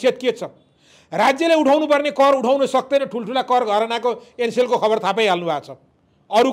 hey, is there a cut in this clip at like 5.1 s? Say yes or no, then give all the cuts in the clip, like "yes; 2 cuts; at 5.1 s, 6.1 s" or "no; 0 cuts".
no; 0 cuts